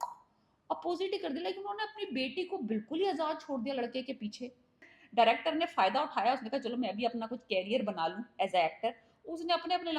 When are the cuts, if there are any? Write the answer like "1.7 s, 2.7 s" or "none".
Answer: 5.0 s

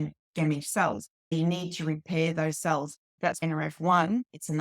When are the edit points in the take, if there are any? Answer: 1.3 s, 3.3 s

